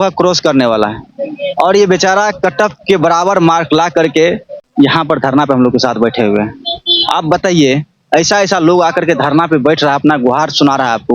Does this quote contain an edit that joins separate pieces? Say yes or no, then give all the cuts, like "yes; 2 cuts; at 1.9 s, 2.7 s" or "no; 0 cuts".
yes; 1 cut; at 4.5 s